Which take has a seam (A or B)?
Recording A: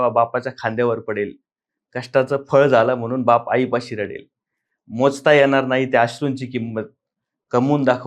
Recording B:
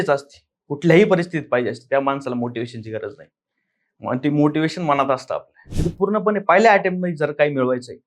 B